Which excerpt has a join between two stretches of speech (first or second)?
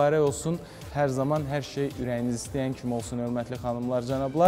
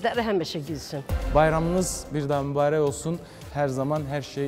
second